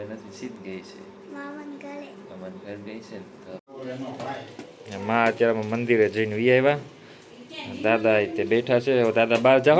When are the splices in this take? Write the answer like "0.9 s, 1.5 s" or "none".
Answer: 3.6 s

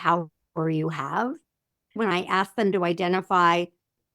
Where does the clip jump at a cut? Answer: 2.1 s

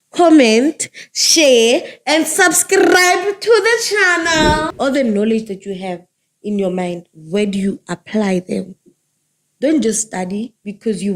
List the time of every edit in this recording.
4.7 s

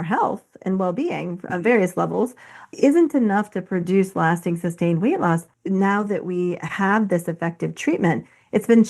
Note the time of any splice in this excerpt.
5.5 s

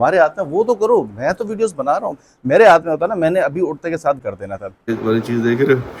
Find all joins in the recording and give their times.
4.9 s

